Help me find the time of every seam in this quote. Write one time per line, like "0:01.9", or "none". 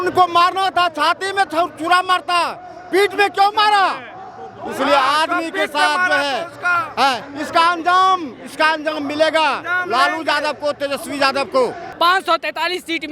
0:11.8